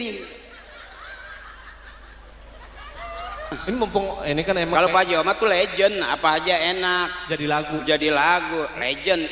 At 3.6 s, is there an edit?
yes; 1 cut; at 3.6 s

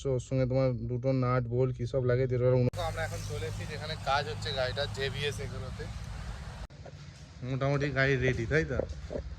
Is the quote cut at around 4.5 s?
no; 2 cuts; at 2.7 s, 6.7 s

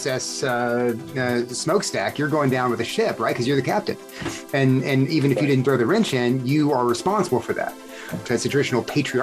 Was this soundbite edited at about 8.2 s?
yes; 1 cut; at 8.2 s

